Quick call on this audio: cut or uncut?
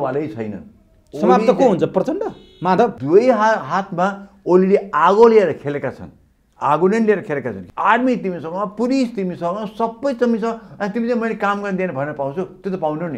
cut